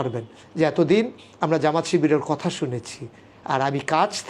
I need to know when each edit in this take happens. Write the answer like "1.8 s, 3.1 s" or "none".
none